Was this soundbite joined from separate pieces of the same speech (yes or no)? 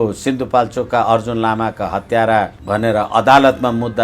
yes